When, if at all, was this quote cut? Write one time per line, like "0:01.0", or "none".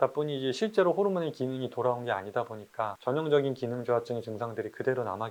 none